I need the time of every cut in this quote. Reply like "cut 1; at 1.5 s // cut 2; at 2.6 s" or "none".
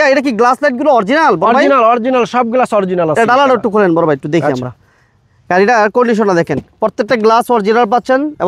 none